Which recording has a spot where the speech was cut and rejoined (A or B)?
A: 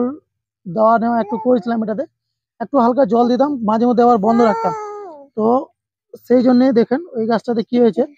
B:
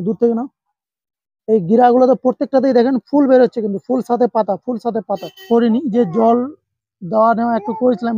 B